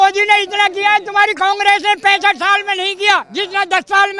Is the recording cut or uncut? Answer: uncut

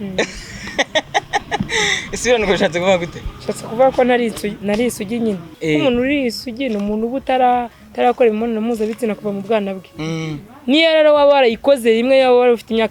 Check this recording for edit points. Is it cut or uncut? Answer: cut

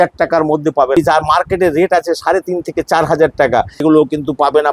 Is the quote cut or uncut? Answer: cut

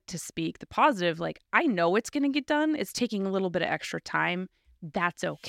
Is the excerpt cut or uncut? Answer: uncut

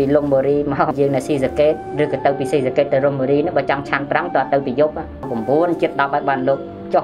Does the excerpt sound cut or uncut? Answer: cut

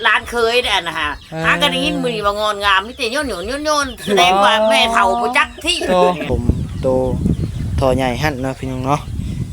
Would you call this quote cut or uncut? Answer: cut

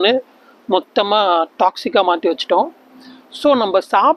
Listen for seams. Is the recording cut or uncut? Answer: uncut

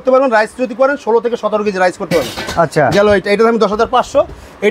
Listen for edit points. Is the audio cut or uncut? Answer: uncut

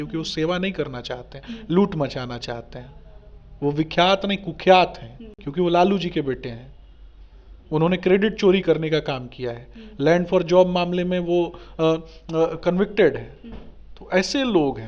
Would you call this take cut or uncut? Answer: uncut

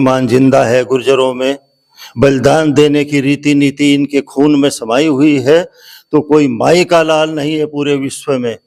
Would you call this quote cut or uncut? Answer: uncut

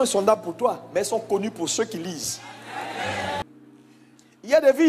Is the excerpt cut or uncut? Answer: cut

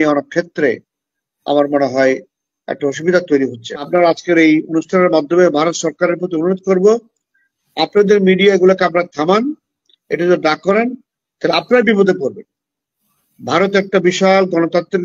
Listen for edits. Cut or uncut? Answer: cut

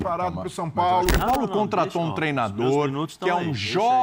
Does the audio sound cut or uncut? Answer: cut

